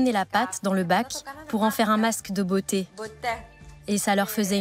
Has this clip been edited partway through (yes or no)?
yes